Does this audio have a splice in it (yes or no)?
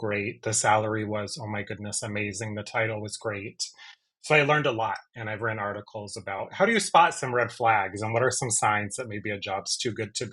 no